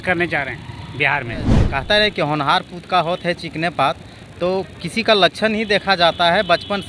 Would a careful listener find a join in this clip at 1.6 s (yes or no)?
yes